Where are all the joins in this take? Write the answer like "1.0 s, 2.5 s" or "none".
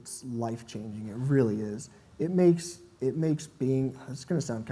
none